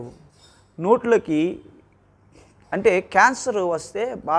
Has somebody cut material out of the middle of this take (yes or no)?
no